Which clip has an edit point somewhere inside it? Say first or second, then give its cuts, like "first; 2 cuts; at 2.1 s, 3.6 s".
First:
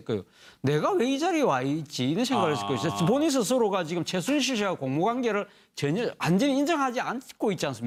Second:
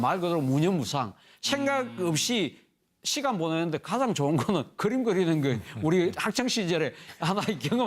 second; 1 cut; at 3.8 s